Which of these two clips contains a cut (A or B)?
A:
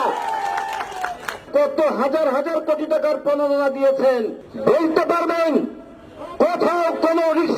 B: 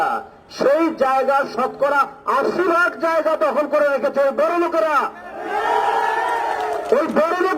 A